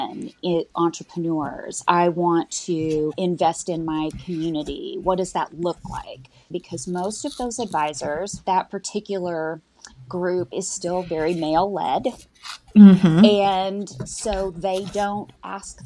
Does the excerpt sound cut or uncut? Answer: cut